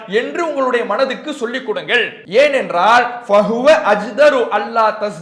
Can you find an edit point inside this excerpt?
yes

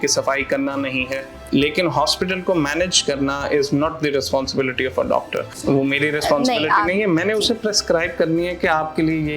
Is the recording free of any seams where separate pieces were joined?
no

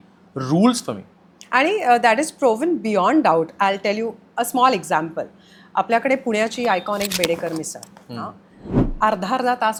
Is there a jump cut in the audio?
no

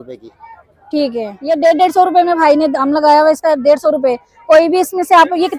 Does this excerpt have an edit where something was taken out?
yes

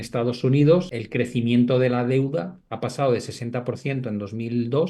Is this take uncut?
no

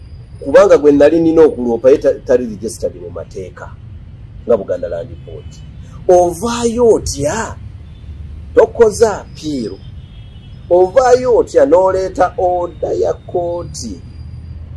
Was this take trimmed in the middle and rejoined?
no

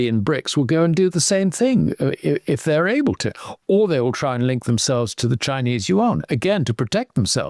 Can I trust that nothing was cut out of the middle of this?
yes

